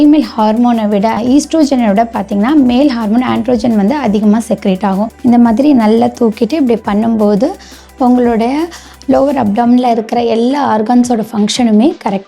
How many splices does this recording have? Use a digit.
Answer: 2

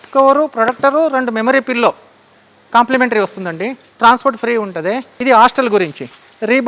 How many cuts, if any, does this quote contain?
1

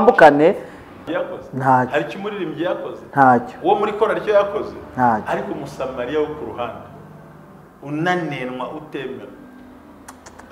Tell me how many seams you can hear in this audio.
1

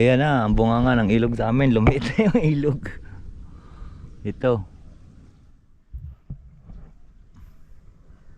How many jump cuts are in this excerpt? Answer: 0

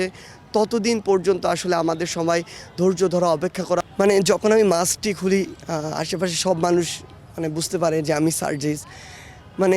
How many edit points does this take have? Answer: 1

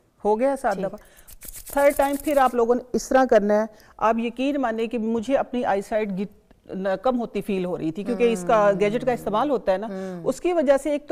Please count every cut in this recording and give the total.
0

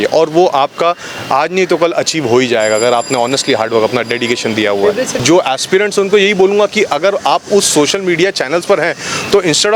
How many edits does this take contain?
1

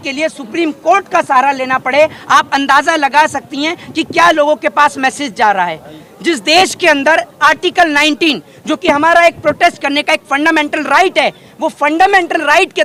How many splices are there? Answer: 0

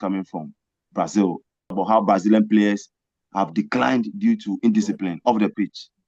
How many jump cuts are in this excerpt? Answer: 1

